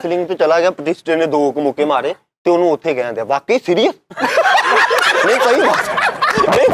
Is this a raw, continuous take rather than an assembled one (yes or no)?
yes